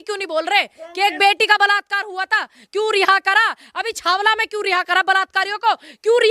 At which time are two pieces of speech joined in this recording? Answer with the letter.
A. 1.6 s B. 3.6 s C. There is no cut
C